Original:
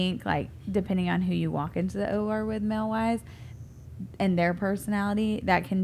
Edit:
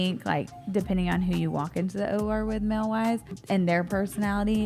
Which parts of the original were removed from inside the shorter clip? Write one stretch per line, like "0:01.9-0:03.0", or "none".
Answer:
0:03.3-0:04.0